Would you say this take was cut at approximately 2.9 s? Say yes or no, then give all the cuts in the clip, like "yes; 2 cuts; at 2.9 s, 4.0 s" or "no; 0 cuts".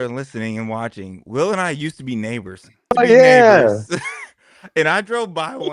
yes; 1 cut; at 2.9 s